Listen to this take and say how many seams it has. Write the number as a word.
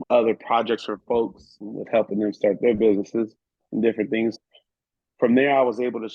two